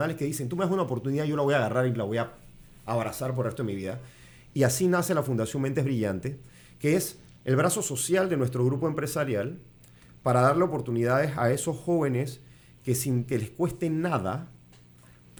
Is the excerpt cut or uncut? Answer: uncut